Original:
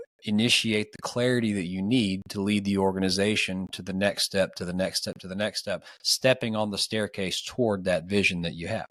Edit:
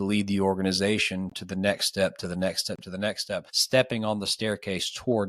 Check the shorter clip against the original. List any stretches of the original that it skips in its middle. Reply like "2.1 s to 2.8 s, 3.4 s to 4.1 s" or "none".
5.9 s to 6.1 s